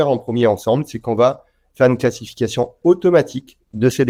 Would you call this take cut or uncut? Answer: uncut